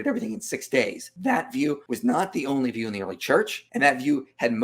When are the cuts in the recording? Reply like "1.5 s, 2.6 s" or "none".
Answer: 1.0 s, 1.8 s, 3.6 s